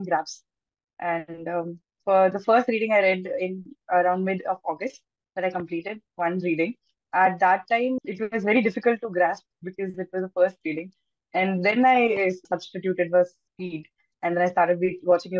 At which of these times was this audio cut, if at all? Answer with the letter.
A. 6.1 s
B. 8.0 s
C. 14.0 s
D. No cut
B